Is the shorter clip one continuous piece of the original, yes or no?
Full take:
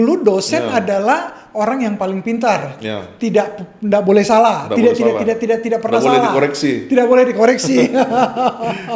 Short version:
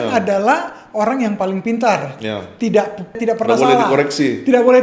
no